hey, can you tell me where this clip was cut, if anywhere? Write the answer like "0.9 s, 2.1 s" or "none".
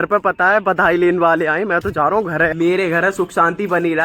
2.5 s